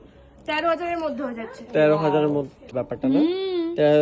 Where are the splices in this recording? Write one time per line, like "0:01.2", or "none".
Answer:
0:02.7